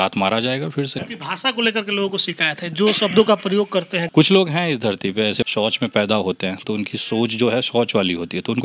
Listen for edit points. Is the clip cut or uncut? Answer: cut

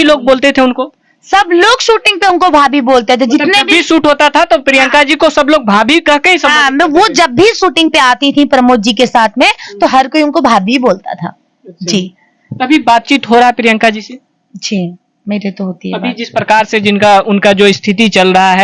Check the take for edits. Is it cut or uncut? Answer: uncut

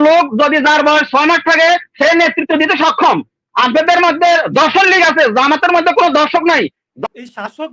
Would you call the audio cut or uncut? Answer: cut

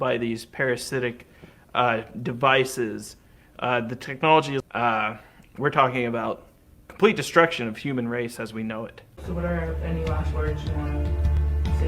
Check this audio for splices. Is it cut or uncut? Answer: cut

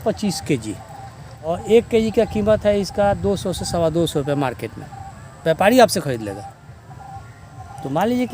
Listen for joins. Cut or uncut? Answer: cut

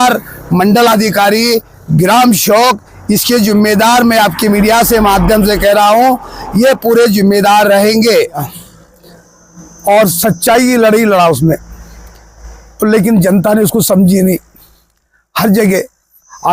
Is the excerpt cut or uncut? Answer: cut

